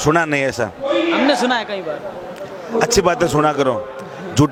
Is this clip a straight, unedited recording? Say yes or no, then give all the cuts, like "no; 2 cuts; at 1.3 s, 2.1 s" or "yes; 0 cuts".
yes; 0 cuts